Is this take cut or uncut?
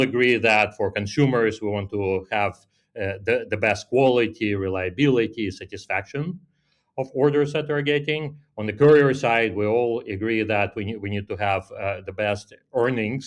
uncut